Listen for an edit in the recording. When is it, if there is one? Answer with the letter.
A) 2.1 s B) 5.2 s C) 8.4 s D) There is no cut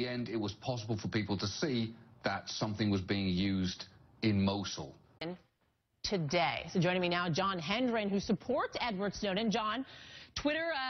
D